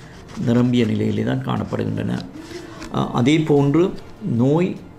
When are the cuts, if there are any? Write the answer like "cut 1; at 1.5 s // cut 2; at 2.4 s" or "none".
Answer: none